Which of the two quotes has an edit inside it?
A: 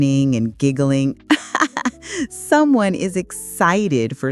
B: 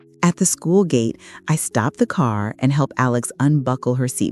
A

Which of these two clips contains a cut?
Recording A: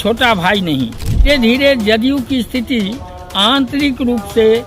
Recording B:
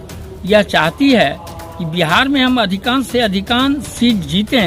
A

